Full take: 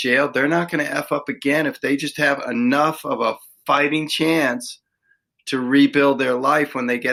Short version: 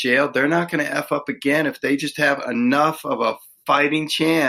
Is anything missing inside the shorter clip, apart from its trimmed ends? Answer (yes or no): no